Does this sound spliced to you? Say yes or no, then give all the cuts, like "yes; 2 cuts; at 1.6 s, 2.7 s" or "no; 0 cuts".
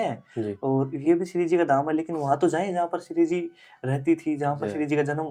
no; 0 cuts